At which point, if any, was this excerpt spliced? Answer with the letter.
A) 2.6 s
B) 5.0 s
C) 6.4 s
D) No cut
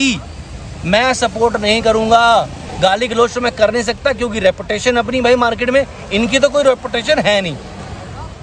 A